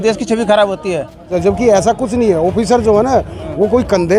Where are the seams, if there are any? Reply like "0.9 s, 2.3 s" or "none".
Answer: 1.3 s